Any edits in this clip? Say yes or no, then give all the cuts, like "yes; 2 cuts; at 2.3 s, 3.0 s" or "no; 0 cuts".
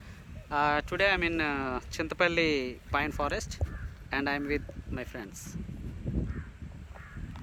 no; 0 cuts